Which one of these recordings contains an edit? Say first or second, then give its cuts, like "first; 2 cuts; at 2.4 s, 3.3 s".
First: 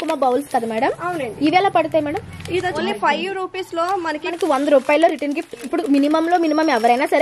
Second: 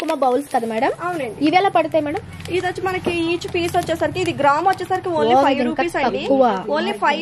first; 2 cuts; at 2.8 s, 4.3 s